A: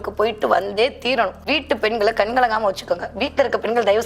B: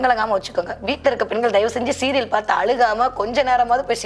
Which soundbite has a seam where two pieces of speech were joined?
A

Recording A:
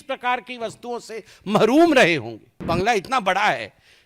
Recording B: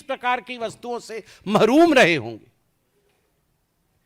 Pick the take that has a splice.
A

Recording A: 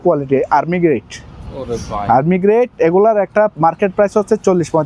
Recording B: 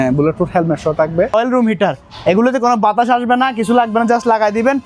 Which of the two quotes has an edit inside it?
B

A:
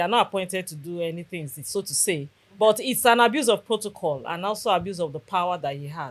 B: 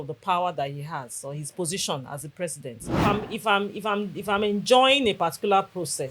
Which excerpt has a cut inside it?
B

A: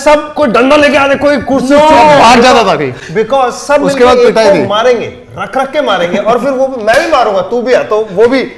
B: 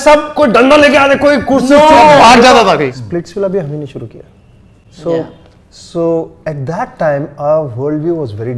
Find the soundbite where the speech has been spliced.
B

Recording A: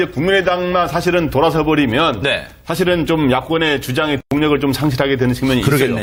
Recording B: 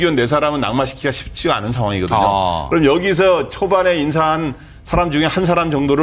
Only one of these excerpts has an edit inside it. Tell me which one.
B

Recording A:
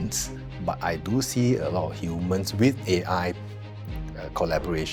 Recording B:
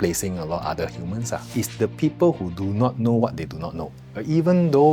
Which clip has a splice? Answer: B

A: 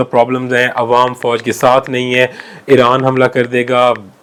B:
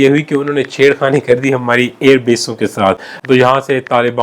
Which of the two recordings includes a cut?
B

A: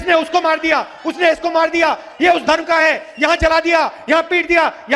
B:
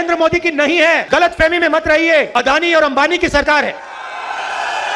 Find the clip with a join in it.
B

